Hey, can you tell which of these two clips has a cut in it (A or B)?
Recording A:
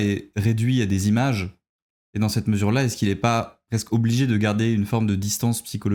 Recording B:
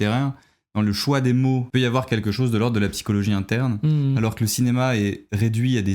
B